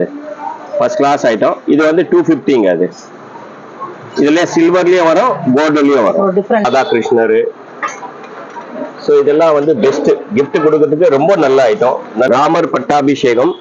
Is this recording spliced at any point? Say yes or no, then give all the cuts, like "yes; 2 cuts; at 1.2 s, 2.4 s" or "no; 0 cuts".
yes; 2 cuts; at 6.6 s, 12.3 s